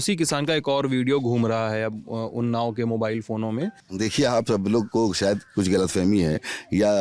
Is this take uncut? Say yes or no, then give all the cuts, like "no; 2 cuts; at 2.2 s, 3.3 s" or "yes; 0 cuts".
yes; 0 cuts